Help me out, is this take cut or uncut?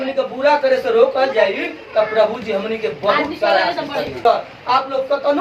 cut